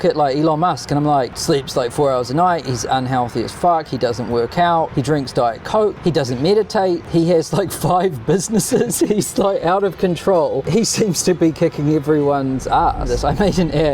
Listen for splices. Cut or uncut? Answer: cut